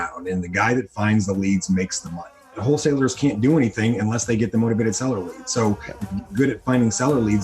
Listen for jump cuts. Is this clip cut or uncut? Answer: cut